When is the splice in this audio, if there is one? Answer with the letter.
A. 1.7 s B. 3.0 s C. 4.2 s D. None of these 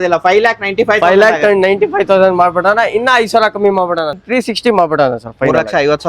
C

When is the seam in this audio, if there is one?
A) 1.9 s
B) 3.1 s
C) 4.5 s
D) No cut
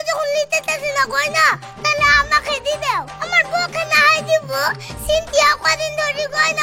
D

